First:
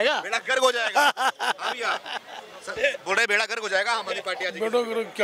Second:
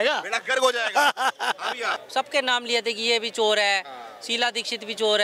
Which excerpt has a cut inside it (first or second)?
second